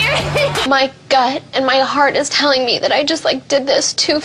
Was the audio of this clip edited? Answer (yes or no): no